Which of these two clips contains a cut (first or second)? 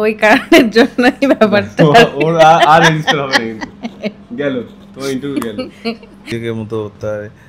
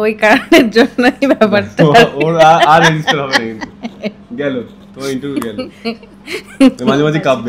first